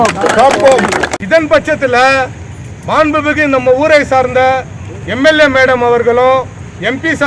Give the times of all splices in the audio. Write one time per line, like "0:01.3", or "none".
0:01.1